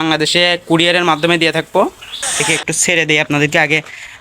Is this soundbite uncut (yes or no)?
no